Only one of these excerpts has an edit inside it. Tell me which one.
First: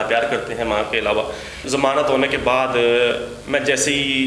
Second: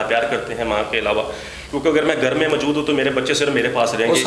first; 1 cut; at 1.6 s

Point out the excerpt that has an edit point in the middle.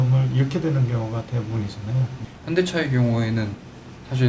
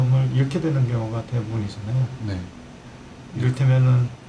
first; 1 cut; at 2.2 s

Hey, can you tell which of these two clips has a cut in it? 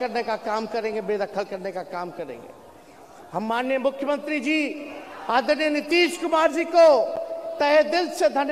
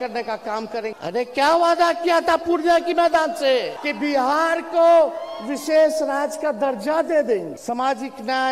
second; 3 cuts; at 0.9 s, 3.8 s, 7.5 s

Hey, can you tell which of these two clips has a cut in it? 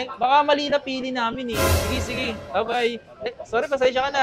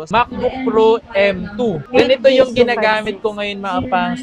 first; 1 cut; at 1.7 s

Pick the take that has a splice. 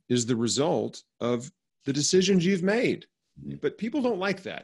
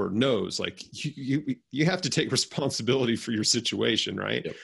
first; 1 cut; at 3.5 s

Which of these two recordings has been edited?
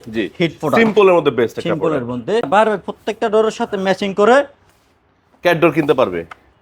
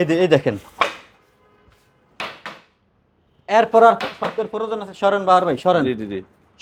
first; 1 cut; at 2.5 s

